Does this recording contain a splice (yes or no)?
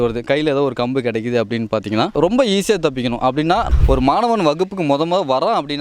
yes